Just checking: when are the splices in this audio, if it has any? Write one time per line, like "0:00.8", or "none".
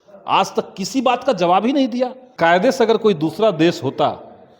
0:02.2